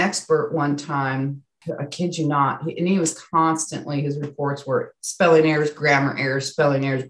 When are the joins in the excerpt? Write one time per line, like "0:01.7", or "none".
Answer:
0:01.5